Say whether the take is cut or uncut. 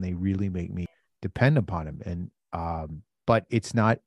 cut